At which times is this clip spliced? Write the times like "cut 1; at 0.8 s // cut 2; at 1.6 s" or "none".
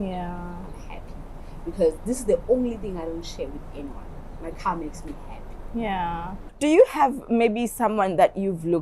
cut 1; at 6.5 s